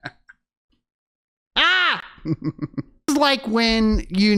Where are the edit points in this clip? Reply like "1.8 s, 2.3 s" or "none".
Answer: 3.1 s